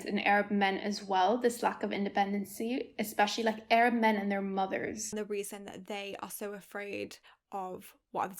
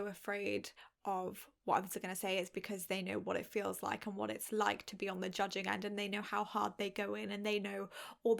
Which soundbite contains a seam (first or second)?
first